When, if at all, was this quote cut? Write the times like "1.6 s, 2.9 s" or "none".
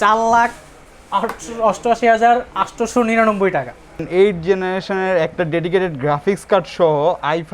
4.1 s